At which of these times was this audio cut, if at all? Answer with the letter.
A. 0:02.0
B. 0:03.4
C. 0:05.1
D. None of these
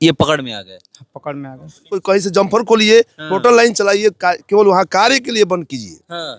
A